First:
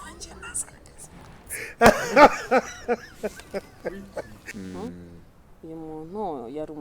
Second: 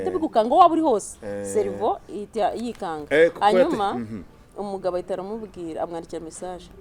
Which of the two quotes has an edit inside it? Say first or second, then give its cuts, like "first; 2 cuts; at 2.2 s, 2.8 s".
first; 1 cut; at 4.5 s